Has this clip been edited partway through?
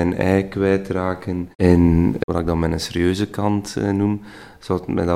no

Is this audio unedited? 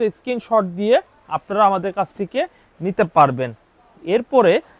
yes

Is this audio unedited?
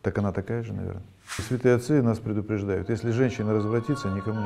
no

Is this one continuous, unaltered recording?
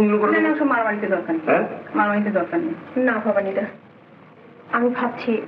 yes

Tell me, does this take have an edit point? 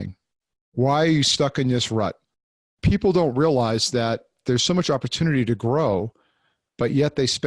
yes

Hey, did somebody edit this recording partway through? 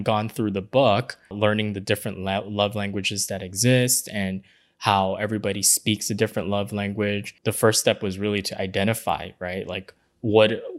yes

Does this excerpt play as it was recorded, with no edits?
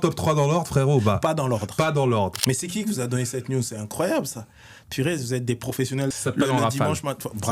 no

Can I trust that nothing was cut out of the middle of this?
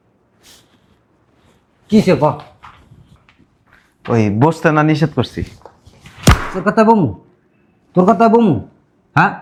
yes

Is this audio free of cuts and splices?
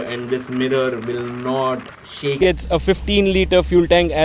no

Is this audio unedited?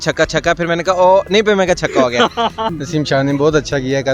no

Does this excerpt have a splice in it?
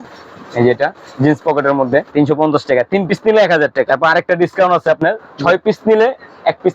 yes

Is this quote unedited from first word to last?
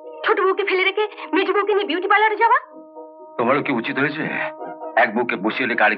yes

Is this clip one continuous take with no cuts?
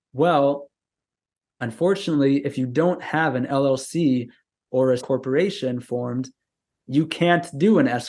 no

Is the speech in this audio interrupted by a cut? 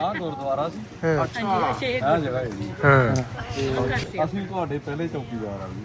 yes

